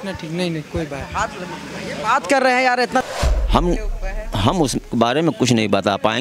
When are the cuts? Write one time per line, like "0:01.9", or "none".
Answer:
0:03.0